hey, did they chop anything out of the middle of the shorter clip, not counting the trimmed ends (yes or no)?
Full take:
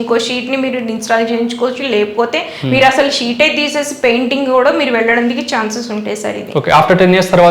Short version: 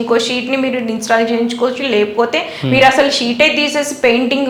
no